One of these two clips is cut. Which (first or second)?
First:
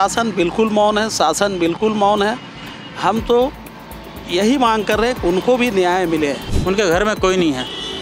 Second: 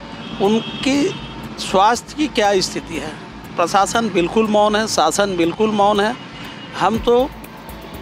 first